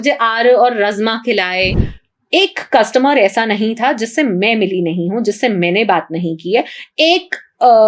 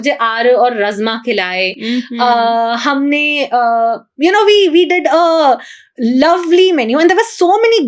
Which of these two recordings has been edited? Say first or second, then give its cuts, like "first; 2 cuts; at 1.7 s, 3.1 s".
first; 1 cut; at 1.8 s